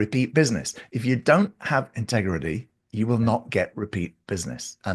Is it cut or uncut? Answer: uncut